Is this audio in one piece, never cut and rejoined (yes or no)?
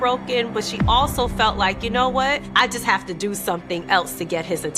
no